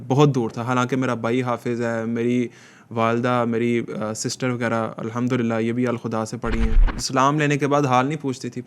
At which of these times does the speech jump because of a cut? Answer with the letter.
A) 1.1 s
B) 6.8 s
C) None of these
B